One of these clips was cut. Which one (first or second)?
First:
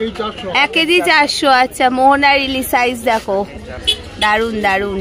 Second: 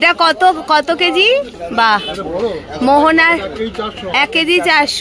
second